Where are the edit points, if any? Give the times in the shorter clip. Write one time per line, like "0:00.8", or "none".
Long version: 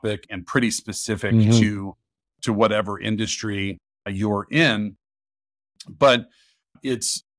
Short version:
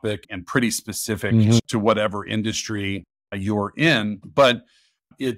0:01.6
0:04.2